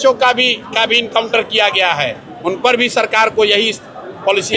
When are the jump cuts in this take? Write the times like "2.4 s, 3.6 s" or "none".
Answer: none